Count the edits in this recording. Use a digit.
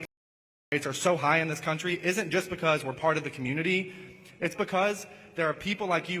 0